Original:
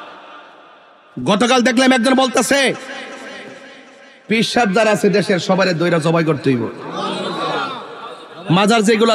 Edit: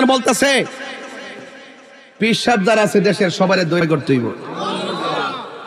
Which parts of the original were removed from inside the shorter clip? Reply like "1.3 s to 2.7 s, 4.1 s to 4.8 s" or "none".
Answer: 5.9 s to 6.2 s